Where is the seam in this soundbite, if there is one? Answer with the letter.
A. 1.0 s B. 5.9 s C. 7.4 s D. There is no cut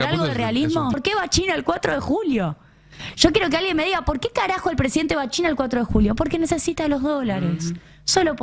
A